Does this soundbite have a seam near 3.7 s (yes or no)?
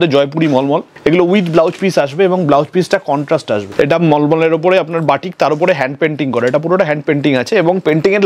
yes